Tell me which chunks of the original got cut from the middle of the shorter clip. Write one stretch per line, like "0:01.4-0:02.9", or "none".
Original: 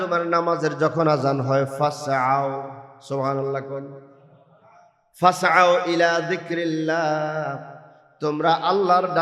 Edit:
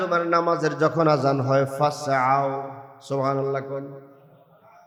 none